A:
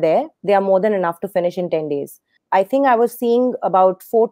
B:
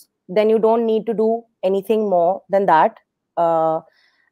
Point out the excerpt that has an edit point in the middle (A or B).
A